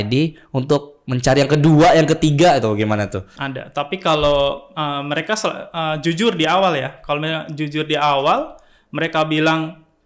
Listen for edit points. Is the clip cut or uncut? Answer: uncut